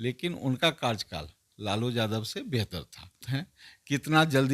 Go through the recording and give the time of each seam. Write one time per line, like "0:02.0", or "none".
0:03.2